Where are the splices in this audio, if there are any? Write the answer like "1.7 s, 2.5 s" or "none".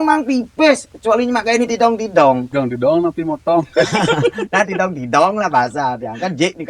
2.5 s